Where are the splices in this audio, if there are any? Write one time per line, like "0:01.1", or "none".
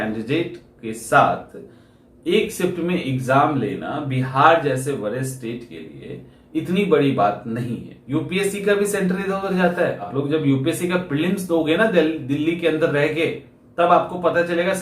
0:07.9
0:10.0